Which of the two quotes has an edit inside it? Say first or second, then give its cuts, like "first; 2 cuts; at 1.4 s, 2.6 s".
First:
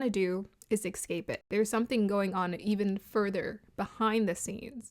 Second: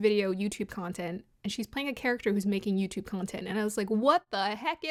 first; 1 cut; at 1.5 s